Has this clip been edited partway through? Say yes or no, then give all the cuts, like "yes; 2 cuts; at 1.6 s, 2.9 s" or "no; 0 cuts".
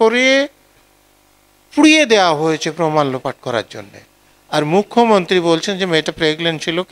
no; 0 cuts